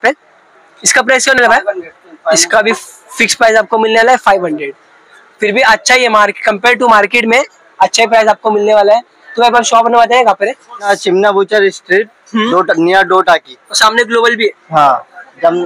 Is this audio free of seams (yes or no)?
yes